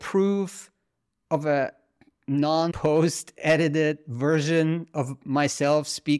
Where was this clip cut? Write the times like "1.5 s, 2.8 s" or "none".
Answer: 2.8 s